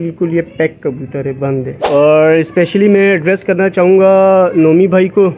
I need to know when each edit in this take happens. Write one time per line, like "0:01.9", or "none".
0:01.7